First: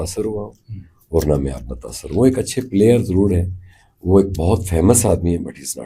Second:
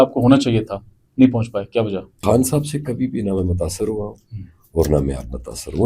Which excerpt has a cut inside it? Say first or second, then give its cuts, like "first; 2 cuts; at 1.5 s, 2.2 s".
second; 1 cut; at 2.2 s